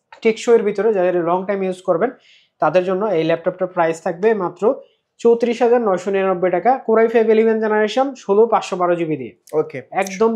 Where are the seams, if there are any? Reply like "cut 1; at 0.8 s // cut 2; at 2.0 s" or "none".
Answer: none